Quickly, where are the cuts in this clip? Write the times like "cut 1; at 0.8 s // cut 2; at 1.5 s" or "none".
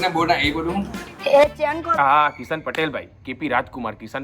cut 1; at 2.0 s